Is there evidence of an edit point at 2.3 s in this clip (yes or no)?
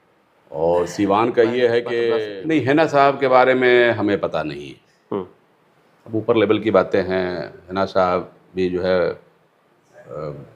yes